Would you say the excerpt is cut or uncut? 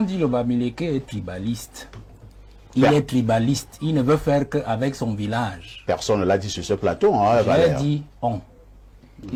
uncut